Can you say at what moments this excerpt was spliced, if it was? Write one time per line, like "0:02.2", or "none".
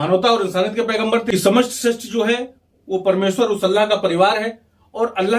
none